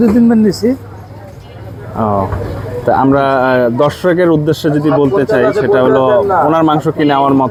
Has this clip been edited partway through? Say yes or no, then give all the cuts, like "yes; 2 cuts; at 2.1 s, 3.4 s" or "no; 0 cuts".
no; 0 cuts